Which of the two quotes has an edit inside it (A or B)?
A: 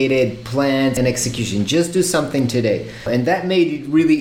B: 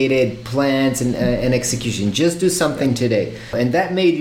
A